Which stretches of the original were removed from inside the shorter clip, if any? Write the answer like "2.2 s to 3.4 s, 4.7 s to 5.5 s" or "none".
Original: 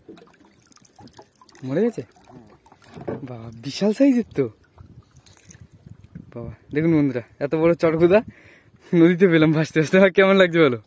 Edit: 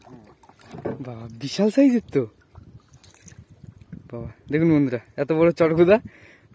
none